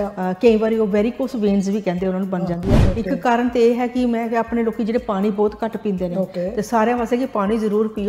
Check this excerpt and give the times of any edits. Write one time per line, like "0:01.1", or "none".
0:02.8